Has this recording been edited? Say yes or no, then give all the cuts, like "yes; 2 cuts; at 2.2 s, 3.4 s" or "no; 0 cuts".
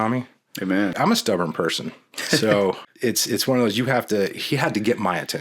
yes; 2 cuts; at 1.0 s, 2.8 s